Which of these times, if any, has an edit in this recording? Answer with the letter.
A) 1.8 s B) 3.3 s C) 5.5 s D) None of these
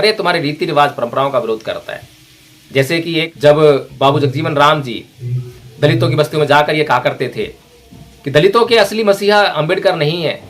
B